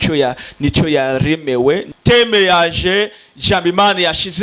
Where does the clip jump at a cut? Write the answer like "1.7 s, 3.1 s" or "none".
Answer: 1.9 s